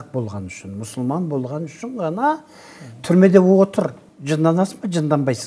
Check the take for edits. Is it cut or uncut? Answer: cut